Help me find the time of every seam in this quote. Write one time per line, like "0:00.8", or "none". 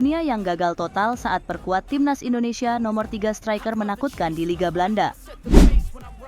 0:05.3